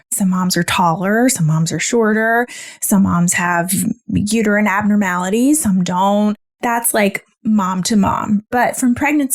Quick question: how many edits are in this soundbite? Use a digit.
1